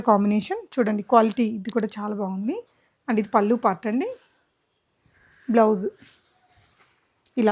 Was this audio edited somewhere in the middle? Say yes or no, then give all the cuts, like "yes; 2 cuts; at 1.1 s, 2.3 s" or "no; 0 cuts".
no; 0 cuts